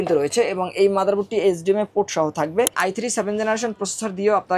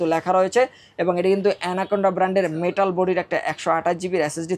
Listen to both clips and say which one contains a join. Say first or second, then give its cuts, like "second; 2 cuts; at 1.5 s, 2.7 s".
first; 1 cut; at 2.8 s